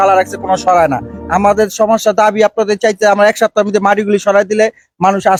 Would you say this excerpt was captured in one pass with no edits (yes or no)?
yes